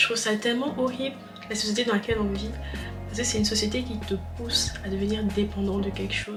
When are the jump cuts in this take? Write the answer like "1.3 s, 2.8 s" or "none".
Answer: none